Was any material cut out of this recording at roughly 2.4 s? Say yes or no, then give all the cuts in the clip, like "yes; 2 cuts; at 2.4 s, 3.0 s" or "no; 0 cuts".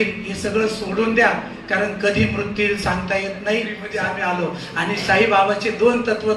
no; 1 cut; at 3.9 s